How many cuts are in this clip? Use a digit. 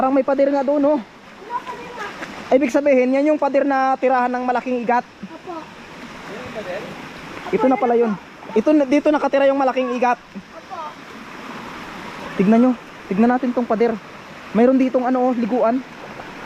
0